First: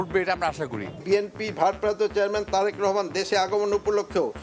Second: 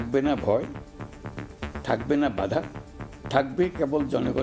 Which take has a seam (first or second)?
first